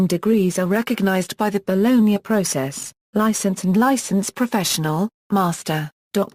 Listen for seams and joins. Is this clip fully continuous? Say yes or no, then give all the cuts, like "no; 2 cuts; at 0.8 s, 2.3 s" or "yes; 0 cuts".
yes; 0 cuts